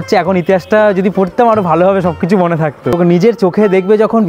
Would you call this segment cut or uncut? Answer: uncut